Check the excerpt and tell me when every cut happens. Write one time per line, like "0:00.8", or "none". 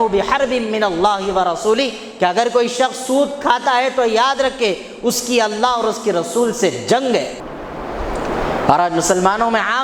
0:07.4